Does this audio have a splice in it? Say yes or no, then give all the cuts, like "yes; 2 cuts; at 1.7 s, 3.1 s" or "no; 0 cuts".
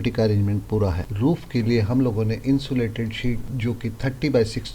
no; 0 cuts